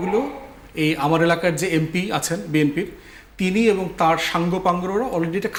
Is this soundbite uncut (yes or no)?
yes